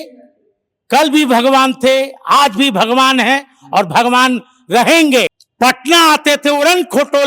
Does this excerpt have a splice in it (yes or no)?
yes